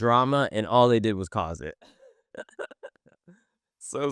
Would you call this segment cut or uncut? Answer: uncut